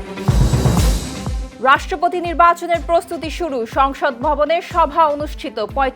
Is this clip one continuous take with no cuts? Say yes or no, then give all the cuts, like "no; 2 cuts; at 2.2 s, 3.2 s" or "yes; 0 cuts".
no; 1 cut; at 1.4 s